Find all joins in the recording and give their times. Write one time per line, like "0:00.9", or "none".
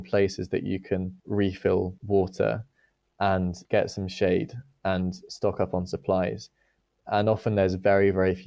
0:01.2
0:02.0